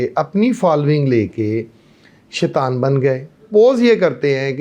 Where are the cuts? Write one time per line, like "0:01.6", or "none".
0:03.4